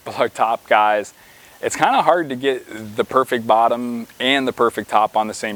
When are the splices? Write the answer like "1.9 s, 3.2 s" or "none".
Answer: none